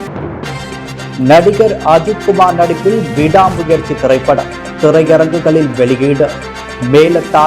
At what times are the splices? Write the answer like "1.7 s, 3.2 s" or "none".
1.1 s